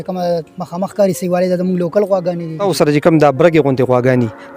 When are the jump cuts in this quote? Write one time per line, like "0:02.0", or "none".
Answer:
0:02.7